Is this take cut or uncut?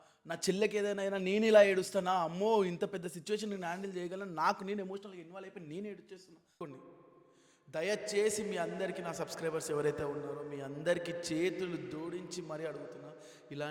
cut